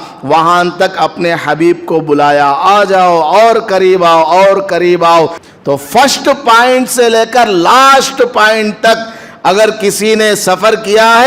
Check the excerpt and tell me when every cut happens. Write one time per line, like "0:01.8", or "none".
0:05.5

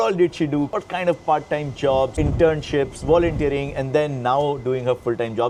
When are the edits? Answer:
none

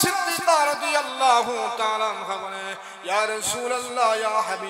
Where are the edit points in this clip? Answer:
none

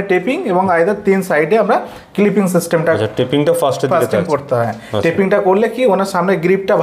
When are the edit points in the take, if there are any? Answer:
none

